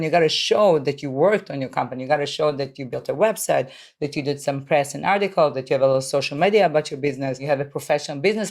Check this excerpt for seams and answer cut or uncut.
cut